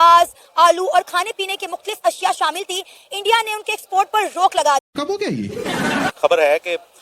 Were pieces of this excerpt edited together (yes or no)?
yes